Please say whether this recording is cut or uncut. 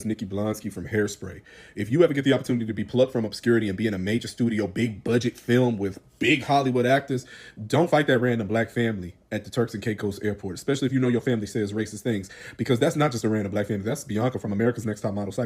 uncut